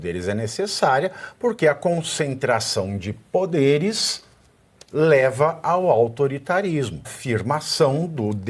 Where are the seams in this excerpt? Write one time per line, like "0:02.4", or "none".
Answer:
0:07.2